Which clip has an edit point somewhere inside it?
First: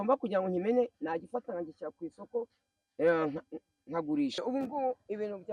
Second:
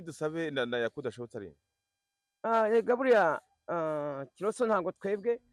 first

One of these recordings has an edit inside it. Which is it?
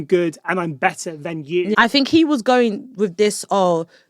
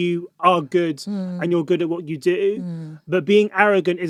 first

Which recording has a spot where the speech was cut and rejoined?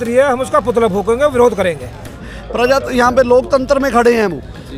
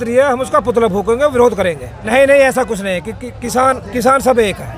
first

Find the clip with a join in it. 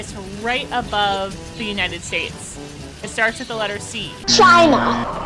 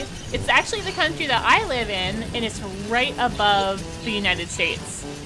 first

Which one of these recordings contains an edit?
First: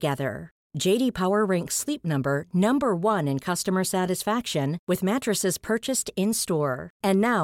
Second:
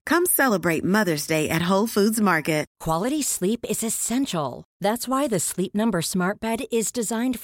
second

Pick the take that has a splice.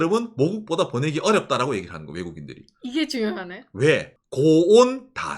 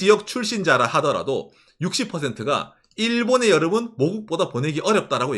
first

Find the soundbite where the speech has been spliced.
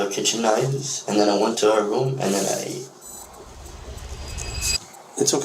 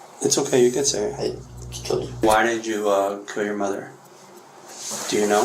second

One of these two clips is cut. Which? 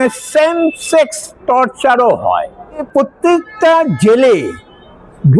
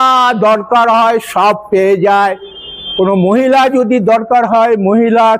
first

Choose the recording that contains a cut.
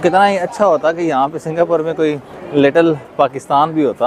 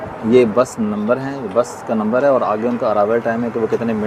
first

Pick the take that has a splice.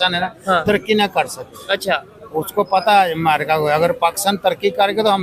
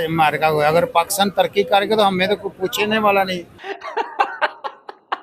second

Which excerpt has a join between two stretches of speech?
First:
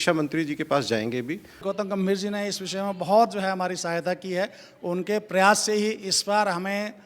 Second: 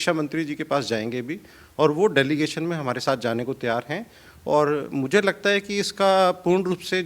first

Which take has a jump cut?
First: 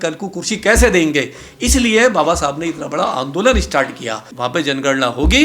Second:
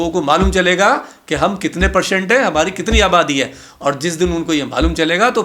first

